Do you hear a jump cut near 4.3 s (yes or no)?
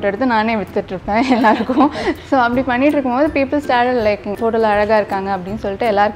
yes